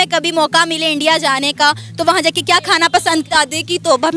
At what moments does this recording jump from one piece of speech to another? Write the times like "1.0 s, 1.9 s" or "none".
none

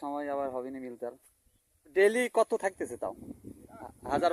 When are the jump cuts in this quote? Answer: 1.9 s

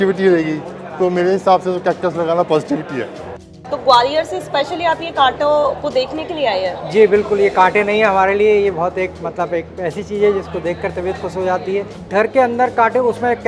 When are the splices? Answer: 3.4 s, 12.0 s

